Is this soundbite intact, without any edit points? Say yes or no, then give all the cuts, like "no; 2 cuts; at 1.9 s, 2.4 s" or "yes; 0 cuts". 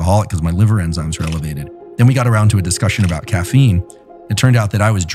yes; 0 cuts